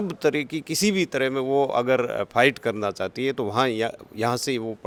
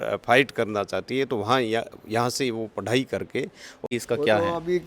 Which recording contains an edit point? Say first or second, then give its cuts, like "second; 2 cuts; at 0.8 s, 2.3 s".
second; 1 cut; at 3.8 s